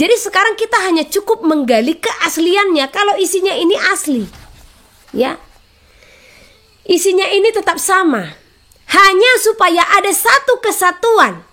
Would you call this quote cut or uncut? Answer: uncut